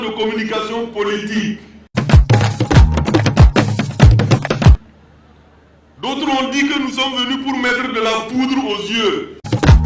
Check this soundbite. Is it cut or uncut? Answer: uncut